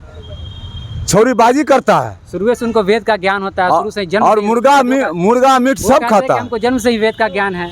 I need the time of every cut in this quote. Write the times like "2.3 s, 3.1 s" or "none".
none